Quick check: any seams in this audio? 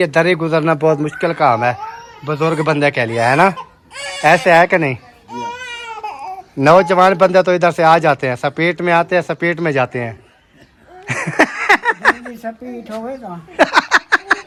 no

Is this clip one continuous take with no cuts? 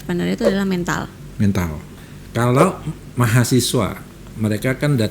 no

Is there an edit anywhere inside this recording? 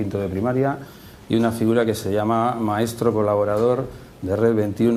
no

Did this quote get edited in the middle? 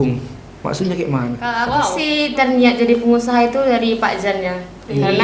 yes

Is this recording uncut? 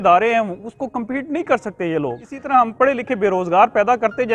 no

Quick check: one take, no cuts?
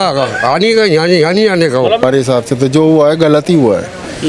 no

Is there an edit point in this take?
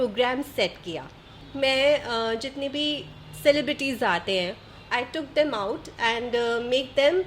yes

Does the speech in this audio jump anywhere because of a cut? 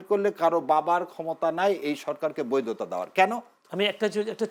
no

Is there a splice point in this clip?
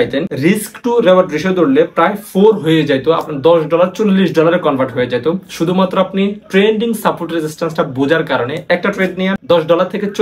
no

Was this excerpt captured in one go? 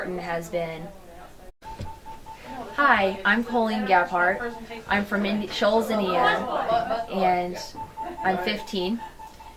yes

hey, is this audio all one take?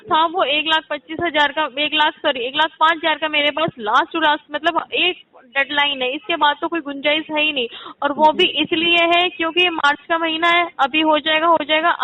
yes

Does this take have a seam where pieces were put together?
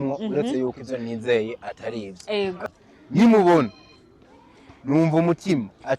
yes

